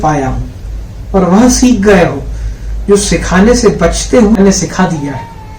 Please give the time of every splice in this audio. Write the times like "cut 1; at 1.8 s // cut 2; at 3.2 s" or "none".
cut 1; at 4.4 s